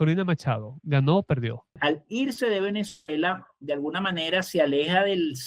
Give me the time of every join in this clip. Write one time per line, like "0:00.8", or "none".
0:01.8